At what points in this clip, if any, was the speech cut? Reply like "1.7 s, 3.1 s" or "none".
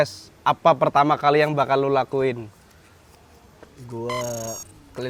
none